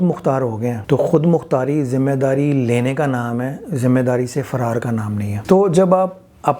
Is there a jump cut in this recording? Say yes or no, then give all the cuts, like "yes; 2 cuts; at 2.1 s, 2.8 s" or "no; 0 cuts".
yes; 2 cuts; at 0.8 s, 5.3 s